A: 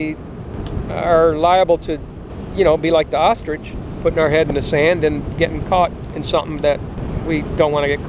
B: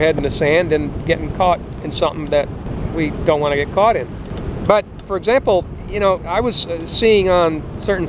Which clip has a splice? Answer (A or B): B